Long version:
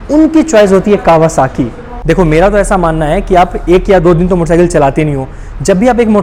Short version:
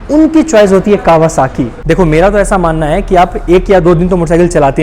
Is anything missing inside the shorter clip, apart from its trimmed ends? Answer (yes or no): yes